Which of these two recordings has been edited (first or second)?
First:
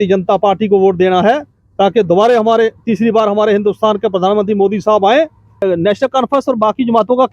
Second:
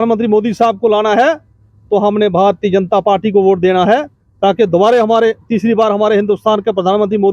first